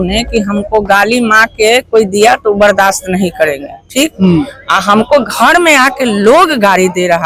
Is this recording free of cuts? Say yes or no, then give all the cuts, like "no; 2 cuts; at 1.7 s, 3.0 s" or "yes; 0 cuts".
yes; 0 cuts